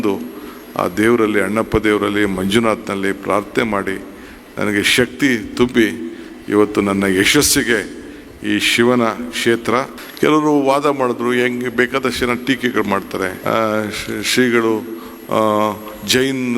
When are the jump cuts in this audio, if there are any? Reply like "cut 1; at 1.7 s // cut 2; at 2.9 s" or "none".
cut 1; at 10.0 s // cut 2; at 13.4 s